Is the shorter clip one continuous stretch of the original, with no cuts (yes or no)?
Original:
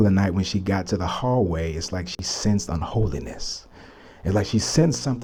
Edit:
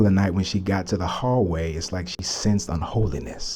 yes